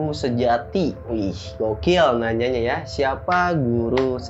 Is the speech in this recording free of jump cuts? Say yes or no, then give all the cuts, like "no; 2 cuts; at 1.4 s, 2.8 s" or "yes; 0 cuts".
yes; 0 cuts